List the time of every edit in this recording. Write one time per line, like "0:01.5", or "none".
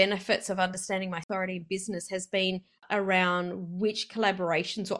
0:01.2
0:02.8